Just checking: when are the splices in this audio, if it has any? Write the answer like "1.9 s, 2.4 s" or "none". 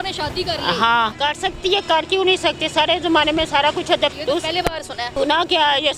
1.1 s, 4.1 s, 5.1 s